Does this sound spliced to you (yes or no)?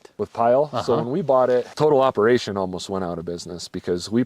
yes